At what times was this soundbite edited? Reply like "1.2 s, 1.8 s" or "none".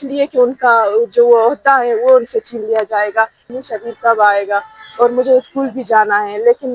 3.5 s